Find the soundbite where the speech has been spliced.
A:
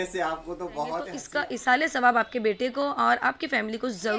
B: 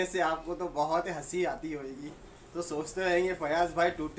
A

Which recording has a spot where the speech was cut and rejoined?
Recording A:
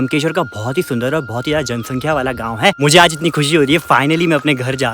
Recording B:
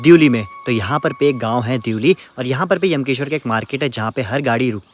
A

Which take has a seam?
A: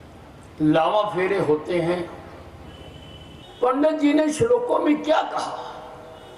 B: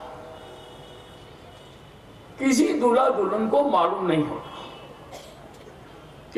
A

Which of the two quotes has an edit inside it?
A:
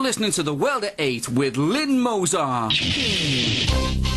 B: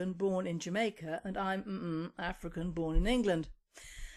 B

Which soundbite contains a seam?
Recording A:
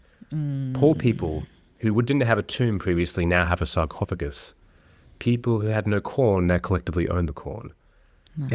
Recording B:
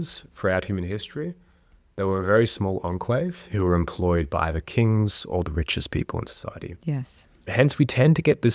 B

